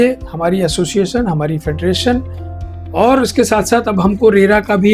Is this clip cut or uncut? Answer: uncut